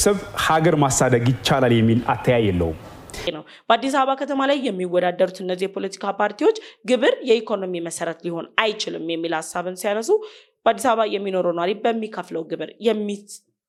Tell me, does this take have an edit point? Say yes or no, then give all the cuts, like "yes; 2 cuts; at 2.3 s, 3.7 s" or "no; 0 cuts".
no; 0 cuts